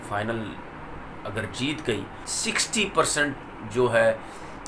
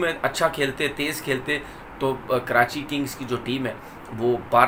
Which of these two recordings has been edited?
first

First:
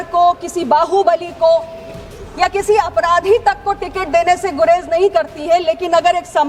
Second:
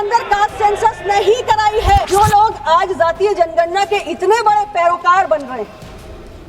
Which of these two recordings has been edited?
second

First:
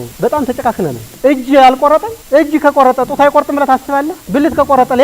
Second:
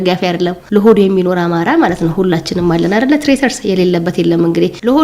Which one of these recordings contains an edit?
first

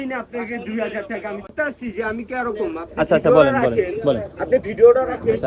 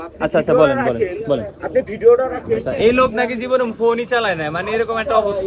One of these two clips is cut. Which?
first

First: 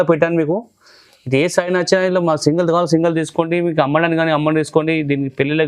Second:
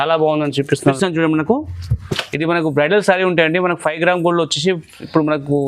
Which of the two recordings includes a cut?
second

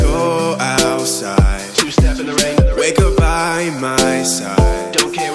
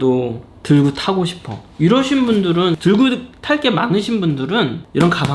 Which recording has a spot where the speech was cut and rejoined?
second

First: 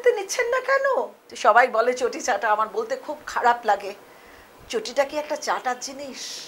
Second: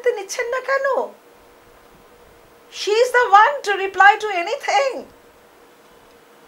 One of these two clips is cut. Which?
first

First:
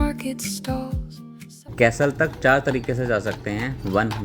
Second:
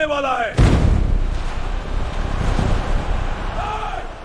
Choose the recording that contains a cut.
first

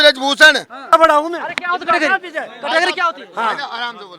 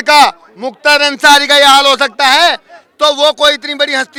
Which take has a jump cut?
first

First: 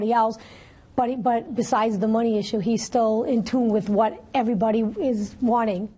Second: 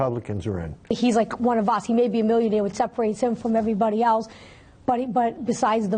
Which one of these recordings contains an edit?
second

